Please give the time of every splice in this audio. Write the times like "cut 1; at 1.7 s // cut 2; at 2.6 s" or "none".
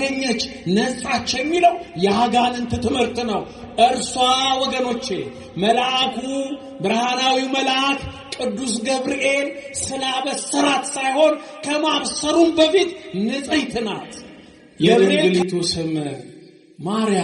cut 1; at 15.0 s